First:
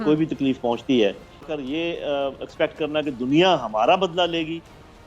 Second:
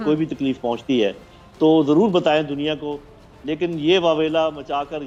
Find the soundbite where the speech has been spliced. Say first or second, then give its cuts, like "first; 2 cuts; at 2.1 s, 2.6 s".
first; 1 cut; at 1.5 s